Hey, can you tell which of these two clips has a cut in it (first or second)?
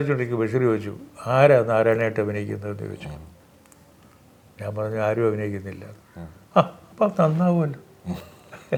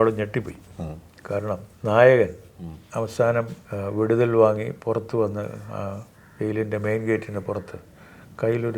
second